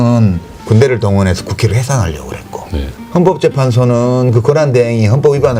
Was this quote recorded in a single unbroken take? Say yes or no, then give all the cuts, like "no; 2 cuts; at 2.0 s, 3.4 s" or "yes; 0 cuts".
yes; 0 cuts